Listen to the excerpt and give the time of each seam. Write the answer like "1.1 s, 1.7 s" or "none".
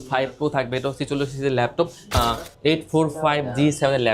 2.2 s

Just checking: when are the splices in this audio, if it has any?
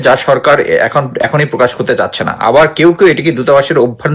none

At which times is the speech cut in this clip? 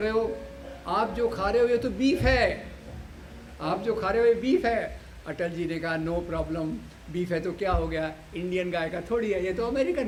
none

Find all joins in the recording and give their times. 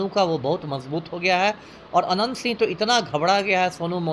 none

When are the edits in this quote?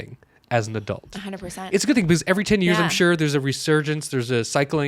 1.5 s

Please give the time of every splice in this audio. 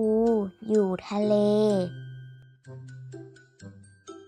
2.0 s

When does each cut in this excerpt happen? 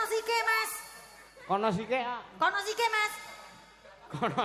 none

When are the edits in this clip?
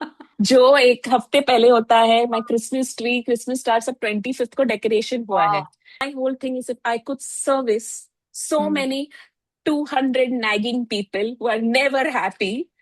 6.1 s

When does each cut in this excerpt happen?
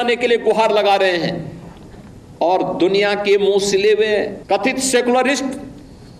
4.4 s

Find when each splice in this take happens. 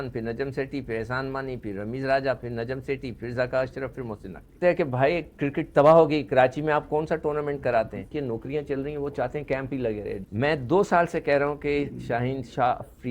4.5 s, 8.1 s, 10.2 s

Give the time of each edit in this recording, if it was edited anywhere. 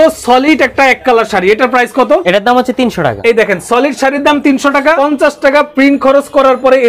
2.2 s, 3.2 s, 5.0 s

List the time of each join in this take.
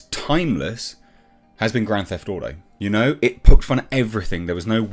2.6 s

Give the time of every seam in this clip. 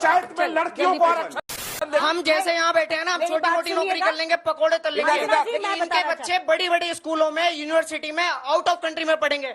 1.4 s

